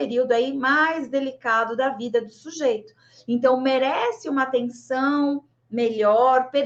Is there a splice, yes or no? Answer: no